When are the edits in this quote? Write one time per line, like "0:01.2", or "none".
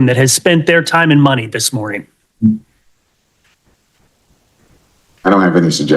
0:04.2